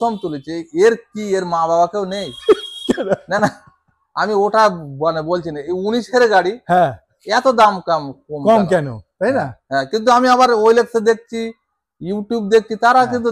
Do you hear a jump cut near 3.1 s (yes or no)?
no